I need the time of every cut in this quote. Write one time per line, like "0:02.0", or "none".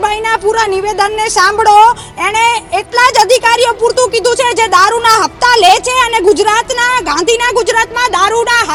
none